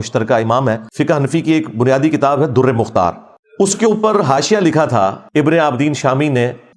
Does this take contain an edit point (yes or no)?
yes